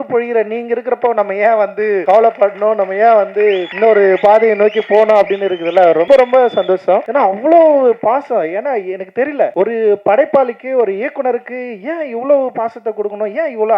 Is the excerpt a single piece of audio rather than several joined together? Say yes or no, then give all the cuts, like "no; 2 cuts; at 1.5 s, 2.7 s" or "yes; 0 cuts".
no; 5 cuts; at 2.0 s, 3.7 s, 6.0 s, 7.1 s, 9.5 s